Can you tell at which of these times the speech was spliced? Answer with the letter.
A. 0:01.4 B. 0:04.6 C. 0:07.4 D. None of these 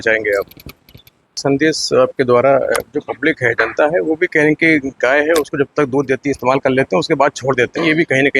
A